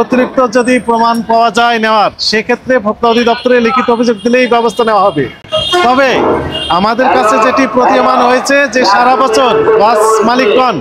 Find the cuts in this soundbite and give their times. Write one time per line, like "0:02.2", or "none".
none